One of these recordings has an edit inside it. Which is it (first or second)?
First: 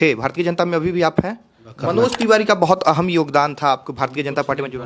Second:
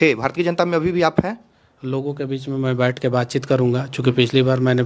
first